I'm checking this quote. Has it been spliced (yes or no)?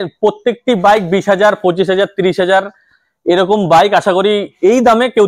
no